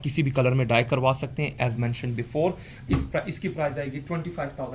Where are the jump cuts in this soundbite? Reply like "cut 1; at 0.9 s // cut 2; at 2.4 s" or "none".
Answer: none